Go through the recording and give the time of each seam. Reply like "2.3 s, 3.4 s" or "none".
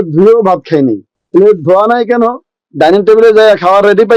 1.1 s